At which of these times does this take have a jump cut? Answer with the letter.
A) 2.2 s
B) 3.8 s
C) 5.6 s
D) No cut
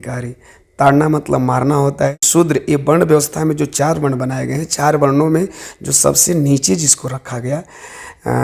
A